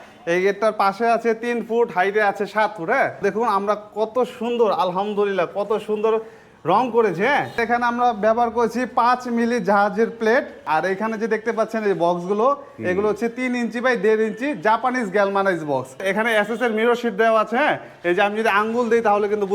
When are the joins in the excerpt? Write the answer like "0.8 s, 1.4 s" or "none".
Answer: 3.2 s, 7.6 s, 10.6 s, 16.0 s